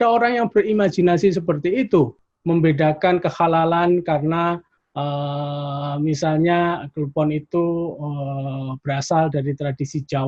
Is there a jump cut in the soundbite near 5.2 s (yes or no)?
no